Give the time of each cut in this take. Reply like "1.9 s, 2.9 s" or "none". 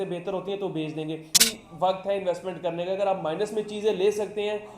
1.4 s